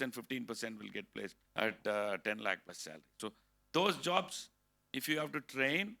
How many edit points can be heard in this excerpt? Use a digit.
1